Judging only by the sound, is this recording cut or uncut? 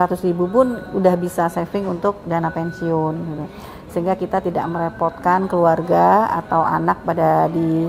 uncut